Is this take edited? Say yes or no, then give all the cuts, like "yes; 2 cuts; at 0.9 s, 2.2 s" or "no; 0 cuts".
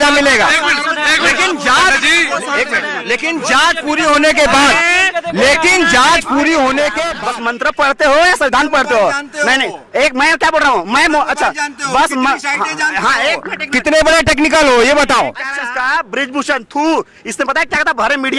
yes; 2 cuts; at 7.1 s, 15.5 s